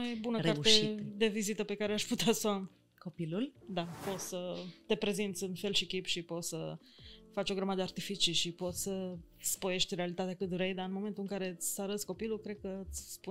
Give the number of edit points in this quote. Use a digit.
1